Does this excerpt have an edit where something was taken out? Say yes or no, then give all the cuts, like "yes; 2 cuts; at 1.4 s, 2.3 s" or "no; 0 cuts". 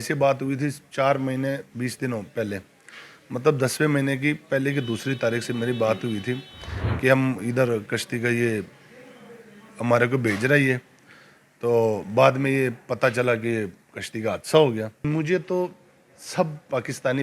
yes; 1 cut; at 15.0 s